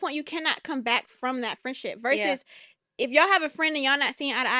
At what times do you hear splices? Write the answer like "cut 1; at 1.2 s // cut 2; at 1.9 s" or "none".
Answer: none